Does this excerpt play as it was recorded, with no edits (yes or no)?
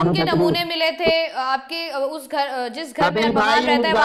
yes